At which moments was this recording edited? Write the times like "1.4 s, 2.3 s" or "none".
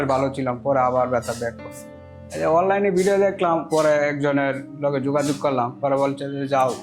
1.9 s